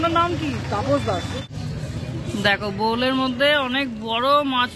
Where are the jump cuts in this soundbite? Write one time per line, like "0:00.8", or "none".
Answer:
0:01.4